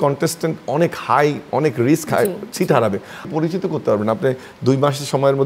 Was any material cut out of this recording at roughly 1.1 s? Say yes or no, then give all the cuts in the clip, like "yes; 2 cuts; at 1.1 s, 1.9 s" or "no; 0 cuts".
no; 1 cut; at 3.3 s